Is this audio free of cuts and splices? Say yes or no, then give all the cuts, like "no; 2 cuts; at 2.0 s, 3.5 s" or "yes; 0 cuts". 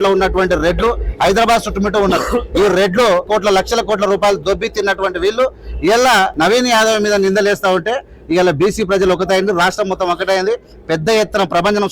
no; 3 cuts; at 3.2 s, 4.4 s, 6.3 s